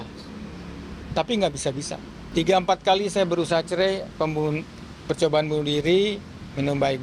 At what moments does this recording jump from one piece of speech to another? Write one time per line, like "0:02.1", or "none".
0:02.2